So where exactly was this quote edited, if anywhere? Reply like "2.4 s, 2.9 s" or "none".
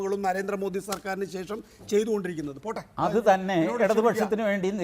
2.7 s